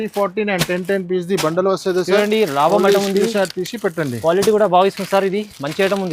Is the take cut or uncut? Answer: uncut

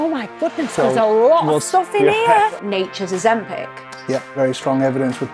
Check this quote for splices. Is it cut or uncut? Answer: cut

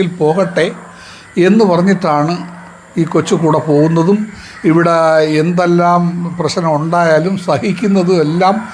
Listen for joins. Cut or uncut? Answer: uncut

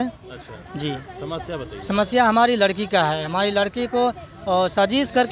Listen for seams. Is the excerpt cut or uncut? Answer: uncut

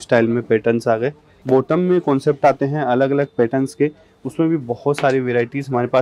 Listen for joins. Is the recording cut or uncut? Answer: cut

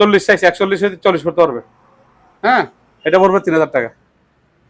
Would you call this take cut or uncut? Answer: uncut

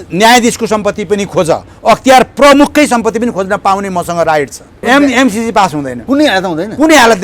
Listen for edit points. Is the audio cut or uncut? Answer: cut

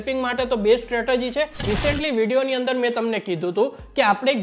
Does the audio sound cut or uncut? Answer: cut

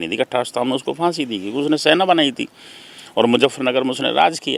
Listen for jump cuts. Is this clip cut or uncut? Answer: uncut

